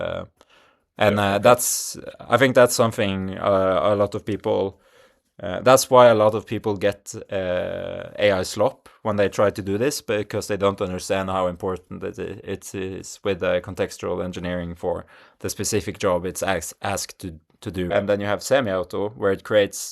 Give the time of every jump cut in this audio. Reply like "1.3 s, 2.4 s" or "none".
17.9 s